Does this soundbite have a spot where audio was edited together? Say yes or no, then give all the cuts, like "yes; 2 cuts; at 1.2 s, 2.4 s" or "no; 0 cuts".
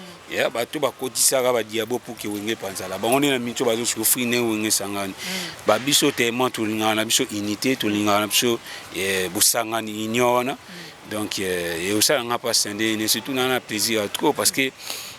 no; 0 cuts